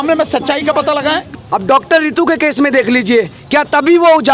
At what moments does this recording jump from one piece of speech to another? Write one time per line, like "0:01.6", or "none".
0:01.3